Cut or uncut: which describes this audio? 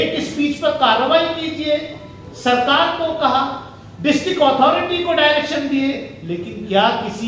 uncut